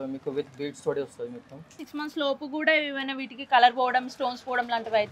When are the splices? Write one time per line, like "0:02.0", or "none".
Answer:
0:01.9